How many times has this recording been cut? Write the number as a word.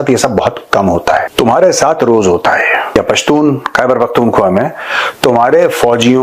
two